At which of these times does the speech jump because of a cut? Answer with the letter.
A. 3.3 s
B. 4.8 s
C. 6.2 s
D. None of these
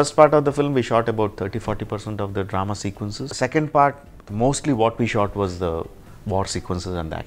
A